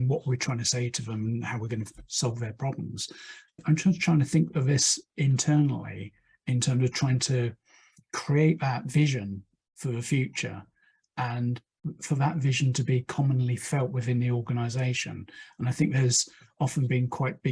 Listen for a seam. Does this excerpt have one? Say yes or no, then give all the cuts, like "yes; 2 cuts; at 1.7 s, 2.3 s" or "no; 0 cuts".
no; 0 cuts